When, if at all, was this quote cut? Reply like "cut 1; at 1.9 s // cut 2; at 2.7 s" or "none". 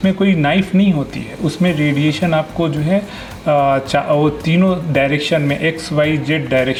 none